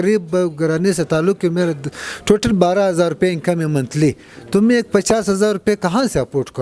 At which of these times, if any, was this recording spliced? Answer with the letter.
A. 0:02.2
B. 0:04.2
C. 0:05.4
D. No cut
D